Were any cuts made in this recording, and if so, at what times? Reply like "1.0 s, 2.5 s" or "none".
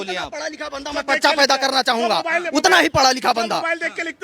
none

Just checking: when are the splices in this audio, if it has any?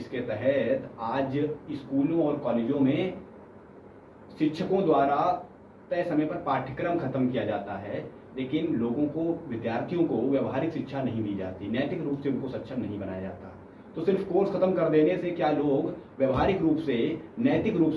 none

